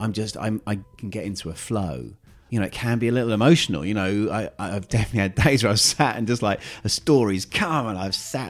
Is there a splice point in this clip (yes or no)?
yes